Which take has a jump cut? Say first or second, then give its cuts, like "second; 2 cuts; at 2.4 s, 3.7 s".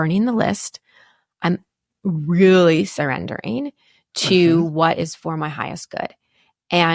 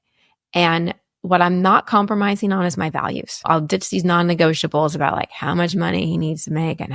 second; 1 cut; at 3.5 s